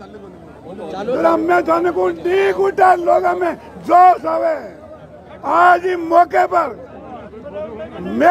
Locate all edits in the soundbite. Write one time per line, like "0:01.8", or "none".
none